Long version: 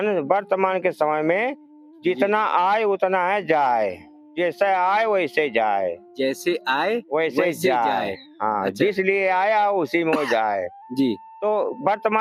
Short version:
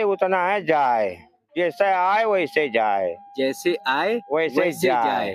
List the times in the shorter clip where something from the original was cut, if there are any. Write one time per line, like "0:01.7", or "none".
none